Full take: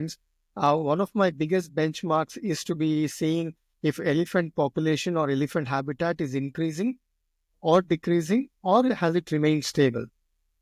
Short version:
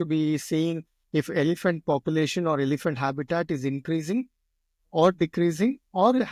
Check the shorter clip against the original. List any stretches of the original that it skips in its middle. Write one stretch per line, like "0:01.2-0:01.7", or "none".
none